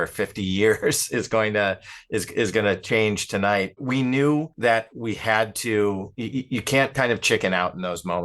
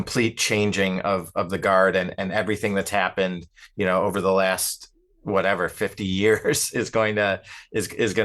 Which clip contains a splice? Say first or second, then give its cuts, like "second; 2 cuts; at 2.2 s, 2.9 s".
first; 3 cuts; at 3.8 s, 4.5 s, 6.1 s